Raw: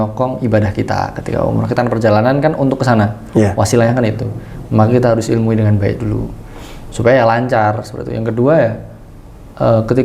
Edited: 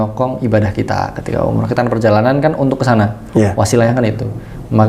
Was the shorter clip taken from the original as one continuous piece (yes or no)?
yes